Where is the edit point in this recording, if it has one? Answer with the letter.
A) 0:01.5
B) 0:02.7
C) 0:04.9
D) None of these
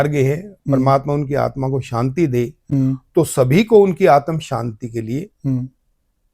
D